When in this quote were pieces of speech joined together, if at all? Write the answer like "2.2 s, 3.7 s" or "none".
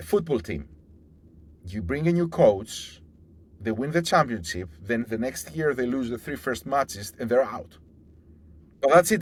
none

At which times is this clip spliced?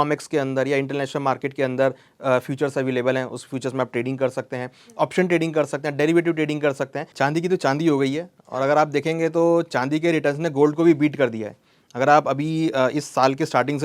7.0 s

